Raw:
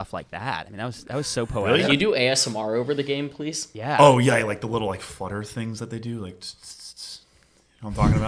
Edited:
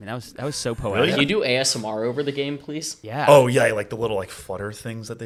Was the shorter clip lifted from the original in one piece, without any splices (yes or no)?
yes